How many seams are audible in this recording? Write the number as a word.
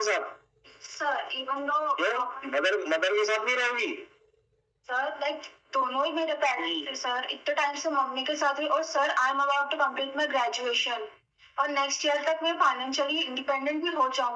zero